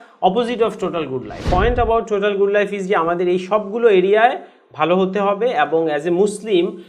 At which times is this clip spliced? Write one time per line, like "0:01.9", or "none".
0:01.4